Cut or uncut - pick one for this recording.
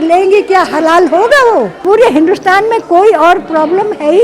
cut